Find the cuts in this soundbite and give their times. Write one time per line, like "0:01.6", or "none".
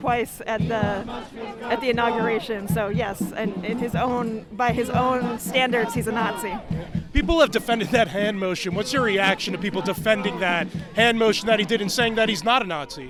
none